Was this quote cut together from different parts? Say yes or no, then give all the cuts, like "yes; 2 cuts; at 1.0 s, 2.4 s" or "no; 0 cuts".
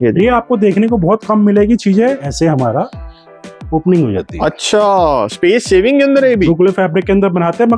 yes; 2 cuts; at 2.3 s, 6.5 s